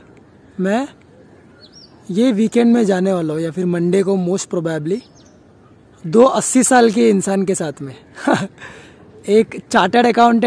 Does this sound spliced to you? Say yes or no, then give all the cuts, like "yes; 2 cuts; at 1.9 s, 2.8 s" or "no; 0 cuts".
no; 0 cuts